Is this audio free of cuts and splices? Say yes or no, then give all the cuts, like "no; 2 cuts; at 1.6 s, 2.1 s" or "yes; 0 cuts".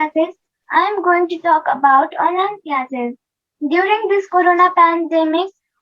yes; 0 cuts